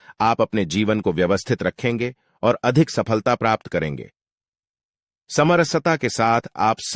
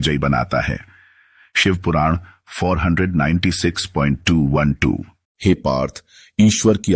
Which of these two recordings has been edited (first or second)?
second